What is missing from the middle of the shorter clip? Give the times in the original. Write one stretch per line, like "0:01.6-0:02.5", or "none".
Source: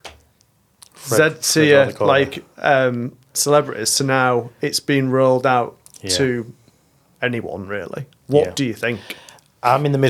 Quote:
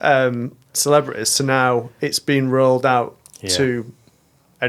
none